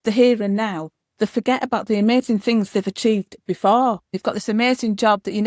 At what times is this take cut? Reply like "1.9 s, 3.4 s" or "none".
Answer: 4.1 s